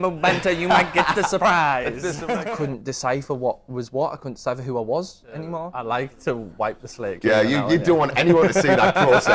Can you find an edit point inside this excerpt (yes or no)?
yes